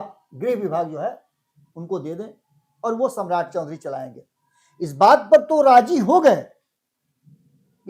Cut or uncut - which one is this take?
uncut